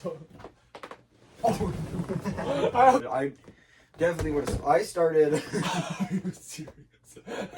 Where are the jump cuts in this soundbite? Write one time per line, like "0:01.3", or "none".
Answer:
0:03.1